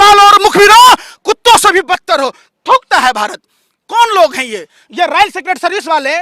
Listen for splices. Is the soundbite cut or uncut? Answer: uncut